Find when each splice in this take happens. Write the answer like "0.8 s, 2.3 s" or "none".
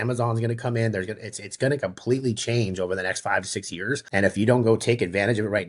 4.0 s